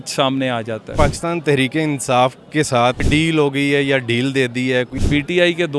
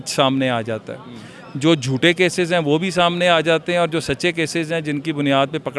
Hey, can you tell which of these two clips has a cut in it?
first; 3 cuts; at 0.9 s, 3.0 s, 5.0 s

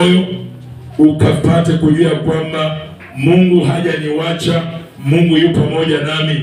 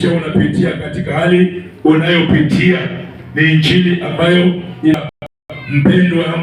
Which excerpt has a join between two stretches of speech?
second; 1 cut; at 5.1 s

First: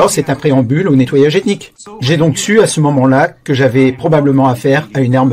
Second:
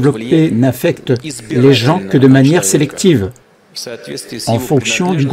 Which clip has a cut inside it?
first; 1 cut; at 1.7 s

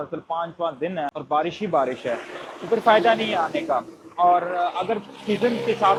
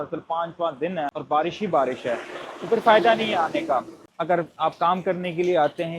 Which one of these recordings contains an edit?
second; 1 cut; at 4.0 s

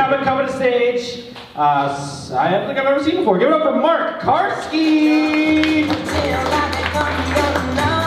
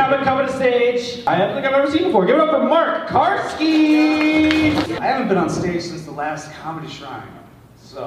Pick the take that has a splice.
second; 2 cuts; at 1.2 s, 4.9 s

